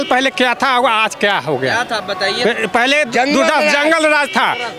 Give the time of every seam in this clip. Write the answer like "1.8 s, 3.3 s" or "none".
none